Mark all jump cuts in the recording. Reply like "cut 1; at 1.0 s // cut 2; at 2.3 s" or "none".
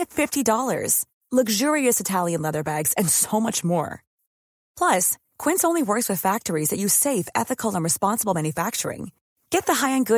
none